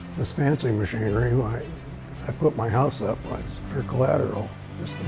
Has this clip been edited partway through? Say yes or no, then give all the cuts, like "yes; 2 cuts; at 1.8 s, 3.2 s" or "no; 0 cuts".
no; 0 cuts